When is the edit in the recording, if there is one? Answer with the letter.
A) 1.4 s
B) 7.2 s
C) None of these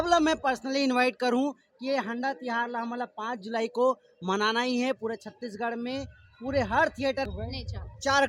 B